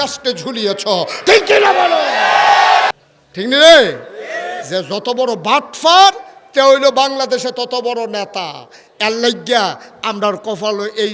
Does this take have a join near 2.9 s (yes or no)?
yes